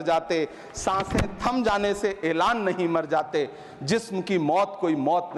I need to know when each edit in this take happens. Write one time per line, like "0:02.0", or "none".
none